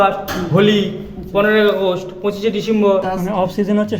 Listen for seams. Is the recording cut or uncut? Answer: cut